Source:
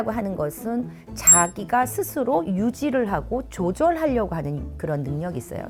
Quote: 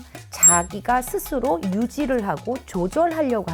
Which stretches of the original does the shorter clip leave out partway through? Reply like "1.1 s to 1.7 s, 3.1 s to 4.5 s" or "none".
none